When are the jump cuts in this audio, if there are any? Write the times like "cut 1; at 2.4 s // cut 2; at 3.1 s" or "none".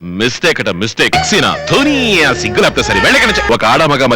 cut 1; at 1.1 s // cut 2; at 3.4 s